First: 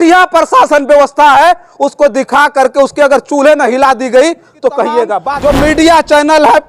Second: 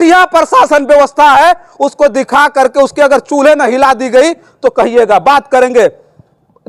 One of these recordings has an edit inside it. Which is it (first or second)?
first